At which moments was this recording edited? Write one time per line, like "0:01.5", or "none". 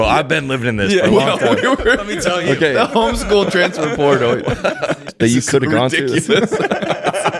0:05.0